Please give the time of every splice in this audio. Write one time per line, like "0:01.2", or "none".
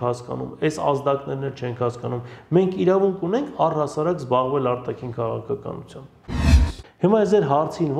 0:06.4